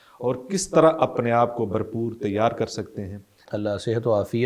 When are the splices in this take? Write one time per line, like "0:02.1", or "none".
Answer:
0:03.4